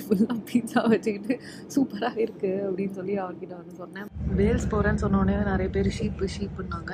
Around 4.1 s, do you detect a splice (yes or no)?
yes